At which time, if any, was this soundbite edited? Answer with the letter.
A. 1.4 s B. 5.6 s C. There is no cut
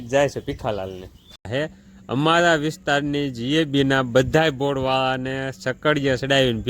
A